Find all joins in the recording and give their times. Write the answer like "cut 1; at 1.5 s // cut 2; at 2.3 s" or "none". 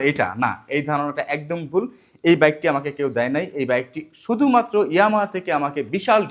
none